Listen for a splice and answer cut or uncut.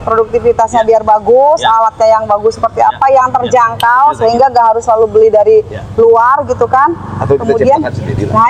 uncut